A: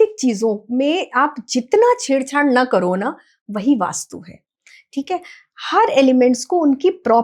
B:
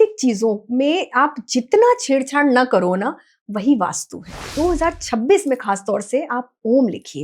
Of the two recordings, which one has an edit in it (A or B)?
B